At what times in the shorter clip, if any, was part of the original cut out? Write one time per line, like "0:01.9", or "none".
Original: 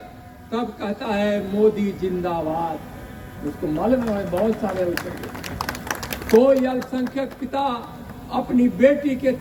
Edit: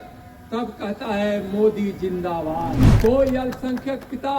0:02.8